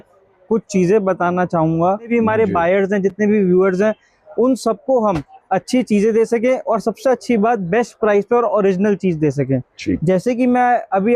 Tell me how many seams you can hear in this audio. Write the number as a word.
one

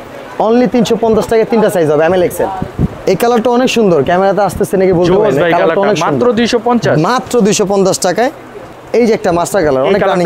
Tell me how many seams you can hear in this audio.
two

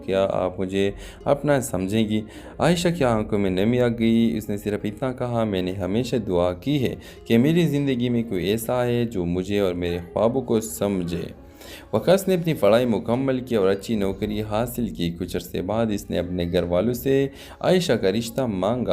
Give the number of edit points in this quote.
one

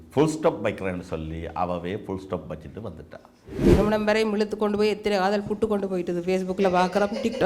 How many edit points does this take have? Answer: one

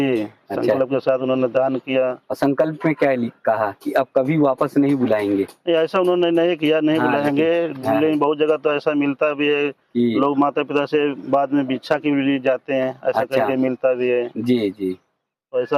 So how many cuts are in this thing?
zero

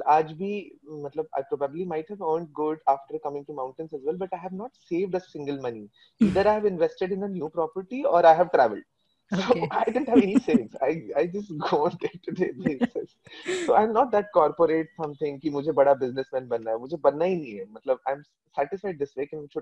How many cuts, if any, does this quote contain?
zero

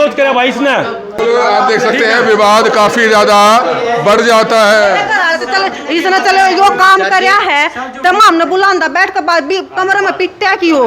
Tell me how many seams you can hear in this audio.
one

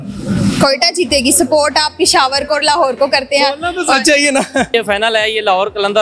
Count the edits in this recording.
one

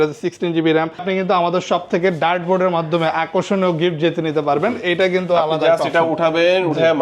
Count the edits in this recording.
one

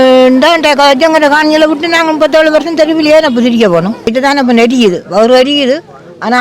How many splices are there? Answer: one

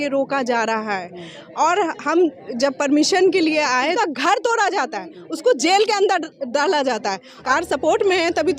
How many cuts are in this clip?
two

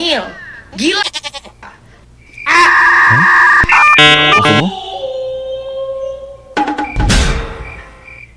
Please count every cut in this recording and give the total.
zero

